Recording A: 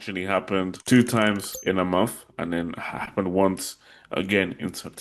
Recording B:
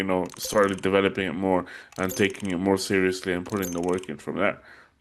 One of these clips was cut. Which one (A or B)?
A